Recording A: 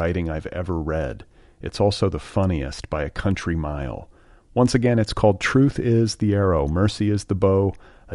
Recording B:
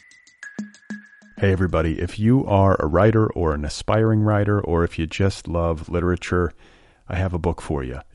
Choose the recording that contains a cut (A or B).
B